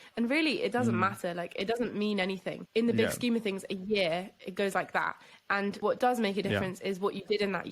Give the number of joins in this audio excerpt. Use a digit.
2